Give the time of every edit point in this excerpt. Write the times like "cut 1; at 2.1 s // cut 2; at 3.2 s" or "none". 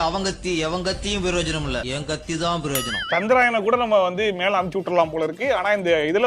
cut 1; at 3.0 s